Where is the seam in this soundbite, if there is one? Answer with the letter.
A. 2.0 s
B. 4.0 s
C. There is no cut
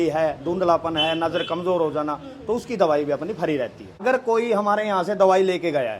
B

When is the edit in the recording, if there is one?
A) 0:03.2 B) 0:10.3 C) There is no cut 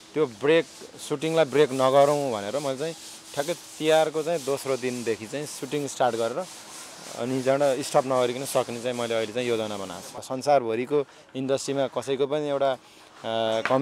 B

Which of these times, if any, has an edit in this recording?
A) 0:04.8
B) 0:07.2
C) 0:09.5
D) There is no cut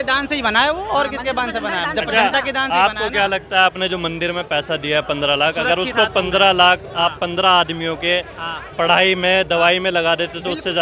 D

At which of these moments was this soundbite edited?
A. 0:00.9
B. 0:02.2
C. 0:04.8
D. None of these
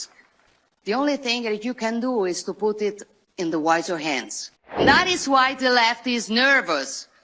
C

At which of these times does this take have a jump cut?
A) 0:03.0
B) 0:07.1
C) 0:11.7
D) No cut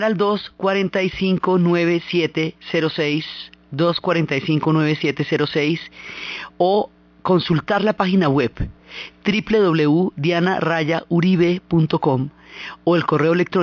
D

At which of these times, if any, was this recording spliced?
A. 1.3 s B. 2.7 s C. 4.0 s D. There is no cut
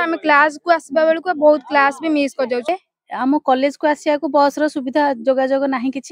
B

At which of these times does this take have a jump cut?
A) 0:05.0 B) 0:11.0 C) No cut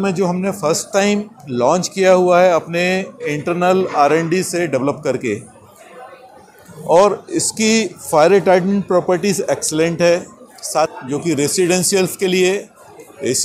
B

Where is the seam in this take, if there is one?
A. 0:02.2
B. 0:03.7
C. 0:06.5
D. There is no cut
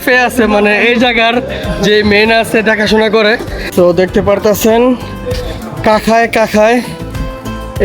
B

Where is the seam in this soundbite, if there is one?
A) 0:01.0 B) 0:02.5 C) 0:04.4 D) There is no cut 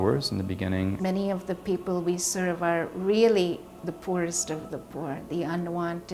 A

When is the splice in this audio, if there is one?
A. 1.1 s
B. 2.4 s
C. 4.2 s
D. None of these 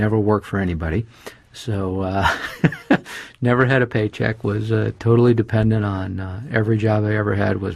C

